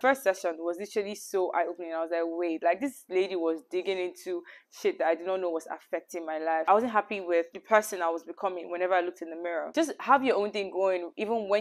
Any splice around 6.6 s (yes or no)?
yes